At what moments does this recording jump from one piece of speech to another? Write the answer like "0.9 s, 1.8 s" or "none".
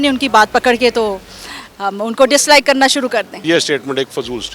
3.4 s